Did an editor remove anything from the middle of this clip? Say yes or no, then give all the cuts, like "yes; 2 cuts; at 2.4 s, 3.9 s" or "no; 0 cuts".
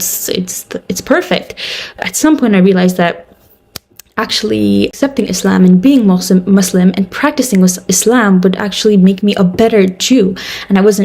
yes; 1 cut; at 2.0 s